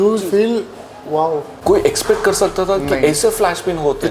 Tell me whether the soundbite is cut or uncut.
cut